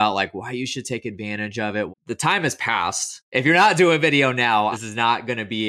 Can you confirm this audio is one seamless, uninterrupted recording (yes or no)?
no